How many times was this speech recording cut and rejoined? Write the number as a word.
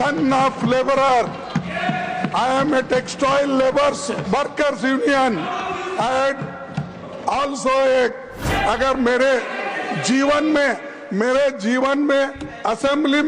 one